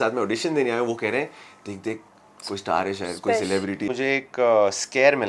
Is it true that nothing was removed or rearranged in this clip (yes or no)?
no